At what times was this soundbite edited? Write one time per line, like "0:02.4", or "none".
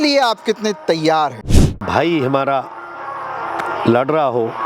0:01.8